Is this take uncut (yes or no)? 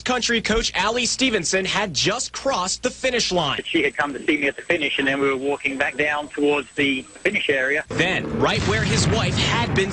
yes